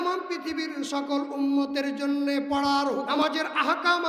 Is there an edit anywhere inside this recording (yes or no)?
yes